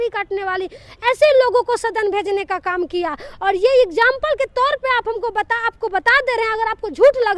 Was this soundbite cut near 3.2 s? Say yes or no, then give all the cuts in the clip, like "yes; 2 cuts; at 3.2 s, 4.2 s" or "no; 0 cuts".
no; 0 cuts